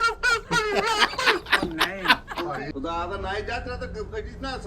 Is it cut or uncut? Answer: cut